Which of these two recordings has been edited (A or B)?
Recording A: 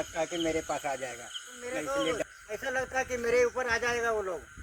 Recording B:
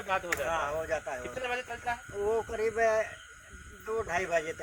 A